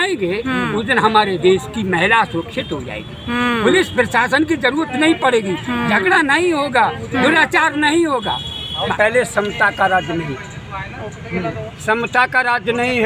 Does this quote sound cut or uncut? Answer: cut